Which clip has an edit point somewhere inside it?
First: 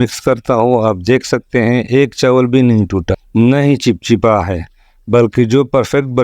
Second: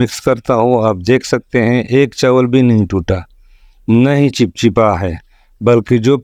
first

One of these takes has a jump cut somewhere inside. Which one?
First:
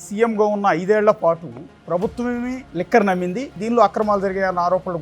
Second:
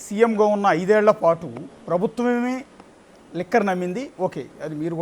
first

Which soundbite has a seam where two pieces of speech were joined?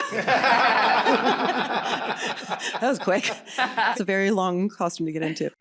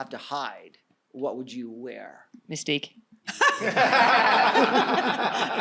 first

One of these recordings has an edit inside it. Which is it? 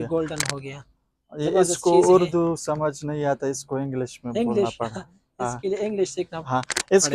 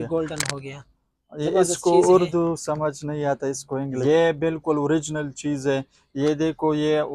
second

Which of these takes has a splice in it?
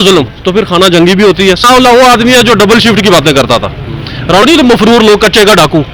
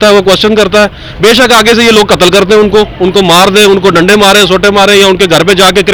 first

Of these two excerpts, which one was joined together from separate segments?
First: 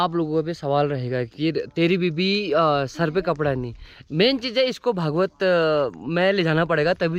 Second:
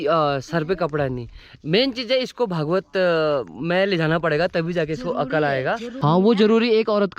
second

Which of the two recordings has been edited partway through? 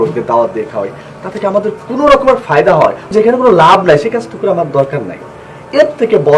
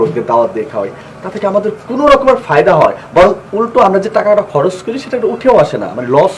first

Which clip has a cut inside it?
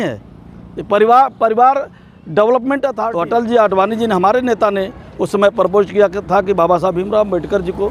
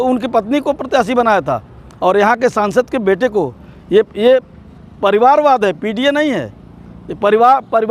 first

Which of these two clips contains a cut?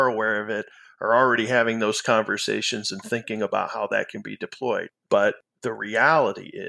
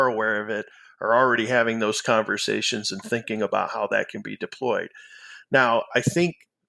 first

